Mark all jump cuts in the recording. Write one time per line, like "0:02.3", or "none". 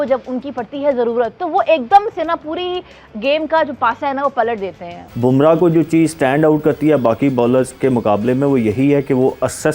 0:05.0